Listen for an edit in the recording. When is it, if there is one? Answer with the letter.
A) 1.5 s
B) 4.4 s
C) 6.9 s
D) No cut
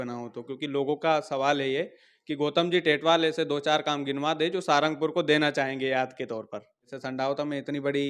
C